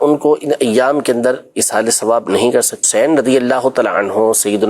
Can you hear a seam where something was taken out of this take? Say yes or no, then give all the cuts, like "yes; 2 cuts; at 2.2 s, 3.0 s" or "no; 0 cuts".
yes; 1 cut; at 2.9 s